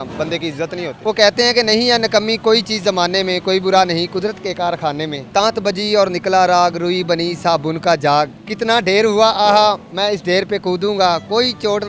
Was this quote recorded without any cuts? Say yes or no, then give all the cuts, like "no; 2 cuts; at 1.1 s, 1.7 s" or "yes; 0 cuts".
no; 3 cuts; at 1.0 s, 5.3 s, 8.3 s